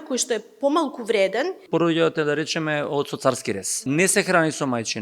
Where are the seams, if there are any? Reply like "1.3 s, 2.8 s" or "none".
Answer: 1.6 s, 3.8 s